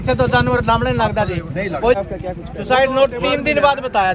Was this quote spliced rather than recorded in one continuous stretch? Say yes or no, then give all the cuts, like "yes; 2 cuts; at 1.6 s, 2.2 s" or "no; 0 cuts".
yes; 1 cut; at 2.0 s